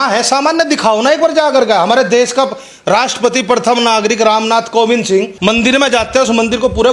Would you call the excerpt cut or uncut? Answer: cut